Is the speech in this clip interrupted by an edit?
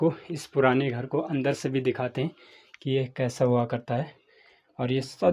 no; 0 cuts

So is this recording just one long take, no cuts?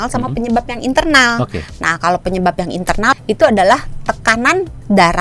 no; 1 cut; at 3.2 s

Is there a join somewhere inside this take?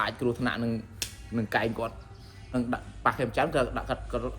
yes; 1 cut; at 2.5 s

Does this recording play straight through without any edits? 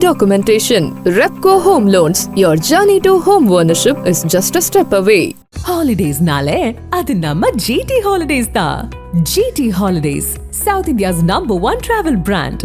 yes; 0 cuts

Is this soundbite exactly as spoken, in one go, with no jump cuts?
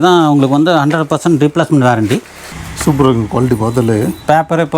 no; 1 cut; at 2.4 s

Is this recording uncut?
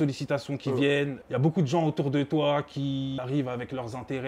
no; 2 cuts; at 1.2 s, 3.2 s

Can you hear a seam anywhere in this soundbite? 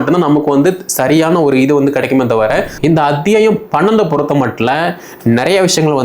yes; 1 cut; at 2.7 s

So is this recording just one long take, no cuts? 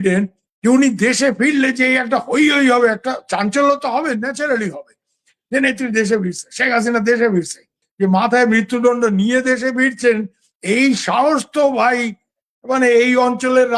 no; 1 cut; at 7.8 s

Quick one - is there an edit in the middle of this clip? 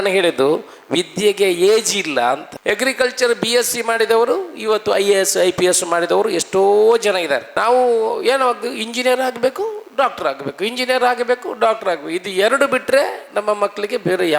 yes; 2 cuts; at 2.5 s, 7.5 s

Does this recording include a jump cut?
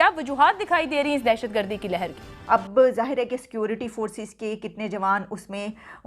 yes; 1 cut; at 2.3 s

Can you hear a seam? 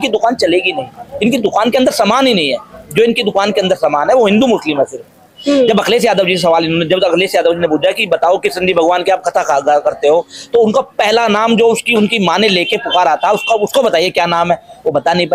no; 0 cuts

